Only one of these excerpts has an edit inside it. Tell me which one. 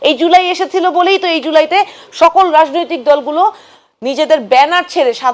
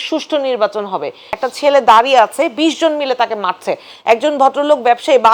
second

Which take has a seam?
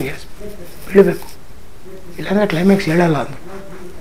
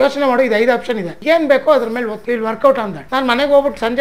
second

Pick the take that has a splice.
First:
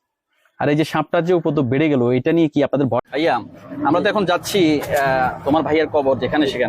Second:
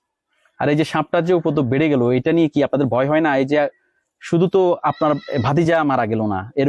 first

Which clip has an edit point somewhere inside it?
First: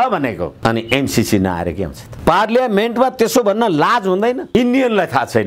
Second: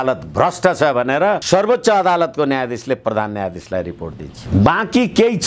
first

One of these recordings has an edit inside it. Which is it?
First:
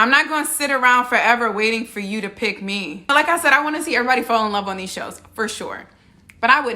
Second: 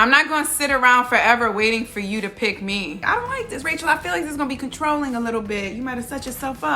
second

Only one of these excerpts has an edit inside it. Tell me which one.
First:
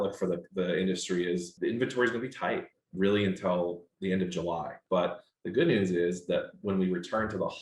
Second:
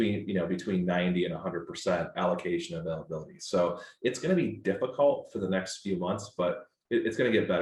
first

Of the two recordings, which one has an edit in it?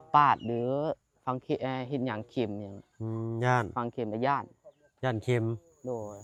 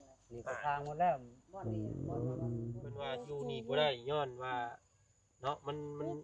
second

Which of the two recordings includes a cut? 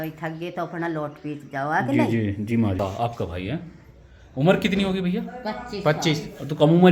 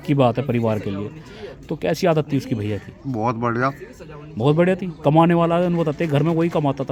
first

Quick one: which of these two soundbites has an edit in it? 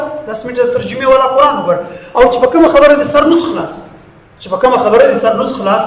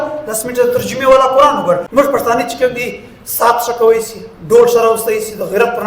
second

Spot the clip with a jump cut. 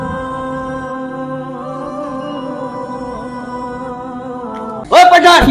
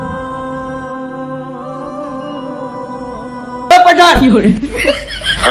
second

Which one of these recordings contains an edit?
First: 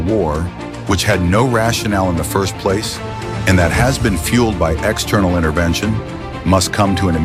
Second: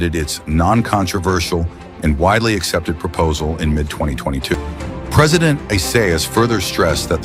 second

